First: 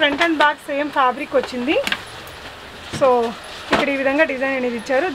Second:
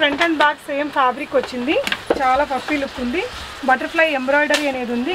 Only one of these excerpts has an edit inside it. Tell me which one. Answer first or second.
second